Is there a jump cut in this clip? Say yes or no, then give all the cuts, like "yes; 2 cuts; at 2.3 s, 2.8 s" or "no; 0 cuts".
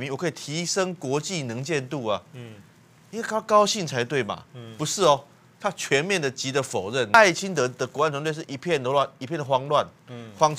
yes; 1 cut; at 7.1 s